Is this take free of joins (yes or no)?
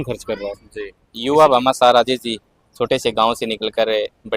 no